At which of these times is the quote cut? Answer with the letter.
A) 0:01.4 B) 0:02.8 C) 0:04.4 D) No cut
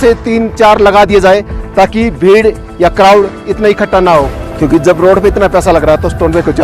C